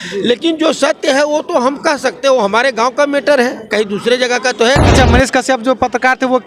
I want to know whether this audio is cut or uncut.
cut